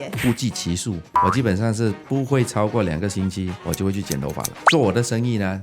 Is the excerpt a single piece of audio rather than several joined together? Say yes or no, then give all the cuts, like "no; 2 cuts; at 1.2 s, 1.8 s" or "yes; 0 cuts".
no; 2 cuts; at 1.1 s, 3.6 s